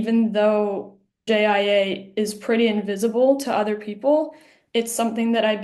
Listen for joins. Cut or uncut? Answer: cut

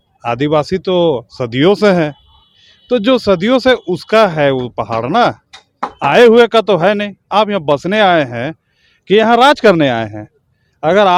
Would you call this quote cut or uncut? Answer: uncut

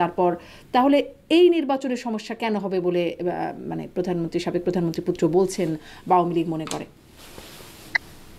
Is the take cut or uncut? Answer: uncut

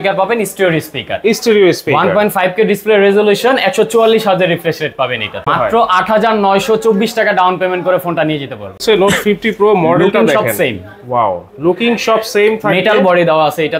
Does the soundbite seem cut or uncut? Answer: cut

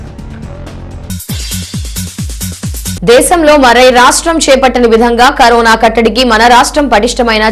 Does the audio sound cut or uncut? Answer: cut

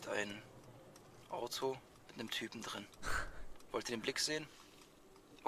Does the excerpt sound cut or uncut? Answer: uncut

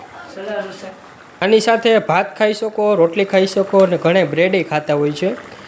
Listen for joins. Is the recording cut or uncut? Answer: cut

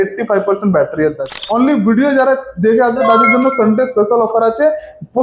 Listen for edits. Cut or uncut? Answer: cut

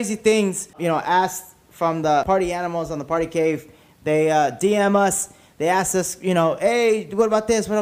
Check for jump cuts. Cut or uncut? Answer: cut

